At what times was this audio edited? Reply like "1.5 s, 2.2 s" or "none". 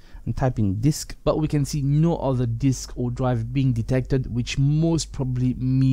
1.1 s